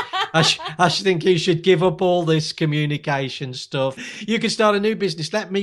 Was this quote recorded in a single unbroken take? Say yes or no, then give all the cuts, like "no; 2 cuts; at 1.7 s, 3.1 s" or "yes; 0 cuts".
no; 1 cut; at 4.0 s